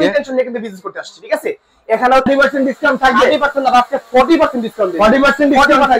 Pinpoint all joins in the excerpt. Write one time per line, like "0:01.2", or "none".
0:02.3